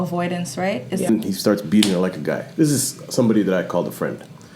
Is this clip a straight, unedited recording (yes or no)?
no